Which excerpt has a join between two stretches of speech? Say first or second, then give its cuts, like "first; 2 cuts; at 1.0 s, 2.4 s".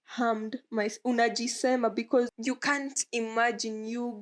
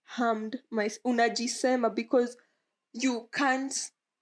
first; 1 cut; at 2.3 s